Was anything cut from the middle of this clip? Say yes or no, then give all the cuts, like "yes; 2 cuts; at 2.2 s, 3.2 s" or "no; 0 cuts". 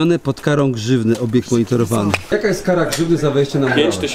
yes; 1 cut; at 2.2 s